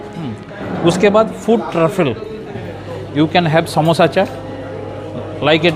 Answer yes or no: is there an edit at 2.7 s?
yes